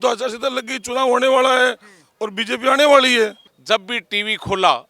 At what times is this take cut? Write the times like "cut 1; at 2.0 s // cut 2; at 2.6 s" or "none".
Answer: cut 1; at 3.5 s